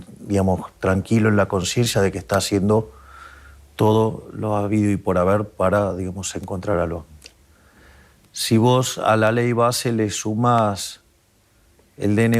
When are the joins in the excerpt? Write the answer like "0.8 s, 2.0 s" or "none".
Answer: 7.2 s